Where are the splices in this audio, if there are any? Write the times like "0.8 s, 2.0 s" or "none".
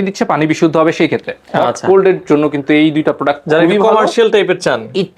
1.4 s